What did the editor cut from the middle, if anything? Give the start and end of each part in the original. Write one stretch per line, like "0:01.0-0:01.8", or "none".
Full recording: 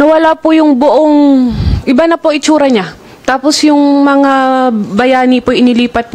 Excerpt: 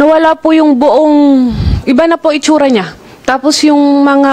none